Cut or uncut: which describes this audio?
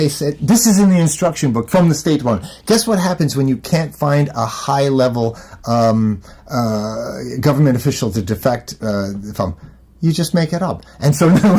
uncut